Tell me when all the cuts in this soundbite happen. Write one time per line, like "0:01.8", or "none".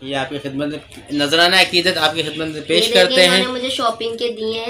none